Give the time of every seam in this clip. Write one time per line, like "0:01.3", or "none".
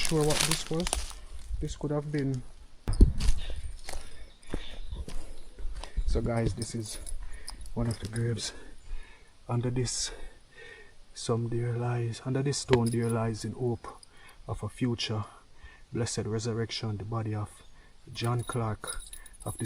0:02.9

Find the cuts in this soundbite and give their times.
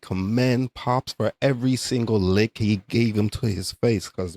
none

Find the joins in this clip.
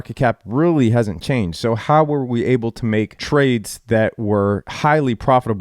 0:03.2
0:04.7

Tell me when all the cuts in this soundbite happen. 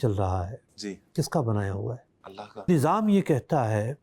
0:02.7

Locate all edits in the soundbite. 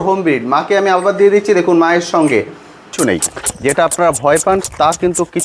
0:02.9

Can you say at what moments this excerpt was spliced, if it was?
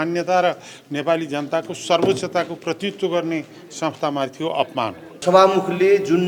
0:05.1

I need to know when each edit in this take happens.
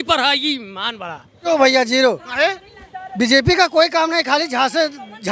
0:01.5

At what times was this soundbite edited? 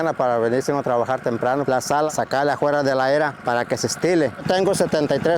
0:01.9
0:04.4

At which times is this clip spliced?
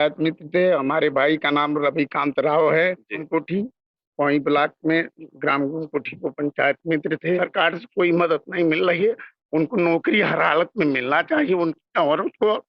0:03.2
0:07.4

